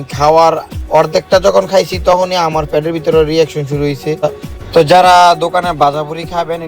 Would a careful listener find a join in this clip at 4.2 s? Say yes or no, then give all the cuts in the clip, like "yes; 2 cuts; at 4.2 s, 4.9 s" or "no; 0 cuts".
yes; 1 cut; at 4.2 s